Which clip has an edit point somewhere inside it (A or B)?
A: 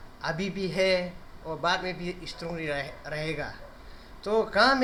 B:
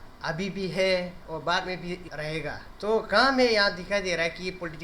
B